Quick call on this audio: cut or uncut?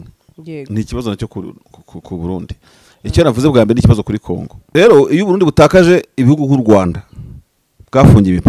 cut